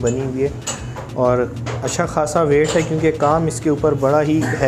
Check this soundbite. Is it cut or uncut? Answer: uncut